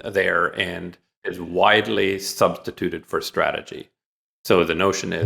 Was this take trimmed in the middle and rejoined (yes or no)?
yes